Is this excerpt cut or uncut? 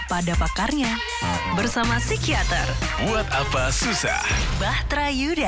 uncut